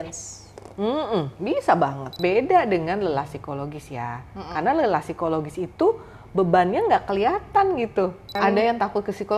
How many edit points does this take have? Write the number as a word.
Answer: two